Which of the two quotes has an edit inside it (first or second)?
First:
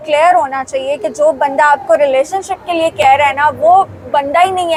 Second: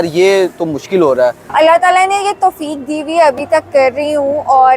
second